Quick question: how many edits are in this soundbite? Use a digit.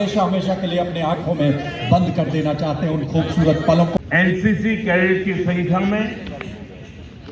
1